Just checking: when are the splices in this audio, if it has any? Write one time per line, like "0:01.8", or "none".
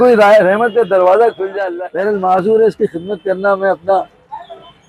0:01.6